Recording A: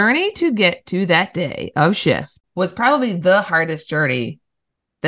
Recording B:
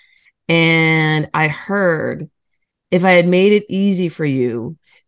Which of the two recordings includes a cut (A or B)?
A